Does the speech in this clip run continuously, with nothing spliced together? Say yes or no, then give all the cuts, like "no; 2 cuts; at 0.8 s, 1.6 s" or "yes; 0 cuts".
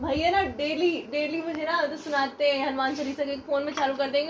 yes; 0 cuts